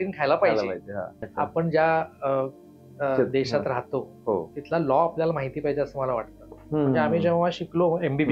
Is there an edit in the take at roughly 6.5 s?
yes; 2 cuts; at 1.2 s, 6.5 s

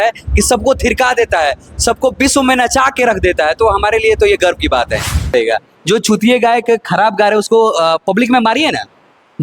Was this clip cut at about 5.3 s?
yes; 1 cut; at 5.3 s

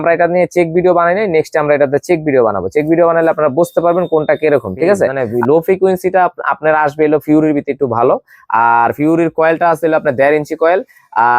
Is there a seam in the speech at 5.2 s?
yes; 1 cut; at 5.2 s

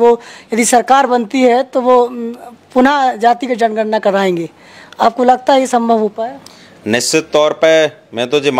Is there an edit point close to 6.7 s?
no; 0 cuts

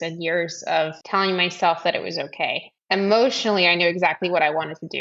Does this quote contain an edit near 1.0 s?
yes; 2 cuts; at 1.0 s, 2.7 s

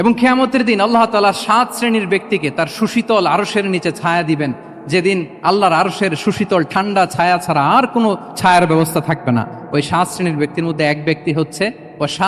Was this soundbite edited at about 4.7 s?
no; 0 cuts

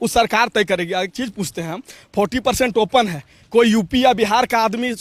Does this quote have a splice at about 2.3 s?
no; 0 cuts

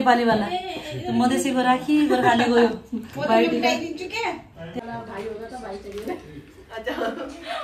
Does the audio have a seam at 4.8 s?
yes; 1 cut; at 4.8 s

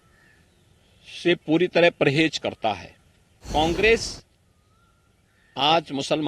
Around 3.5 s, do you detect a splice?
yes; 1 cut; at 3.5 s

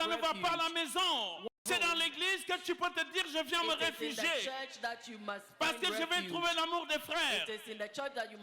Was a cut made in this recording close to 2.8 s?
no; 1 cut; at 1.6 s

